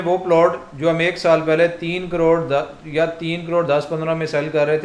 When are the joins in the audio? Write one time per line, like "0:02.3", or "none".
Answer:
none